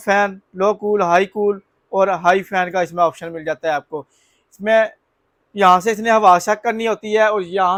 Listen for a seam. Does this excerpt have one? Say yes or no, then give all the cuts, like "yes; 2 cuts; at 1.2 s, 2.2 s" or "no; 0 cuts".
no; 0 cuts